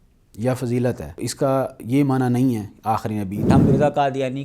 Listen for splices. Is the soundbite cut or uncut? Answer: cut